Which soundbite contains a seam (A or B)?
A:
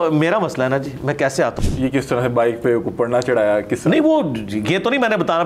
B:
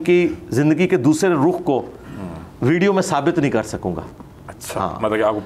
A